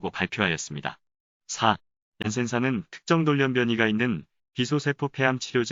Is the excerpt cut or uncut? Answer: uncut